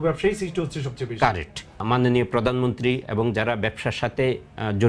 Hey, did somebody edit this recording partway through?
yes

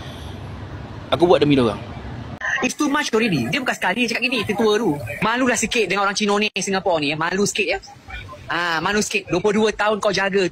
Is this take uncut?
no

